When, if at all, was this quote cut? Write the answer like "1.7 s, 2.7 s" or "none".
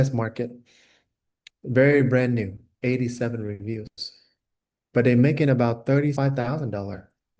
2.6 s, 6.2 s